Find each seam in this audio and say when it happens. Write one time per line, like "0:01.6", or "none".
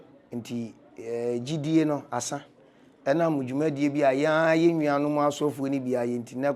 none